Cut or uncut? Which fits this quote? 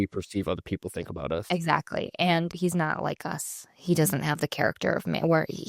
cut